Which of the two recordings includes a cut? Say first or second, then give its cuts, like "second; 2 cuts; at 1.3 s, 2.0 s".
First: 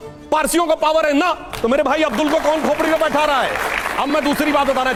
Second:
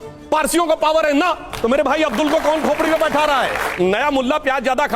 second; 1 cut; at 3.7 s